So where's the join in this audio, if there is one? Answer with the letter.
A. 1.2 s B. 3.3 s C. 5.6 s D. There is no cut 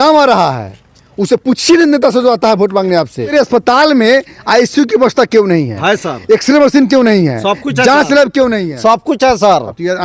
B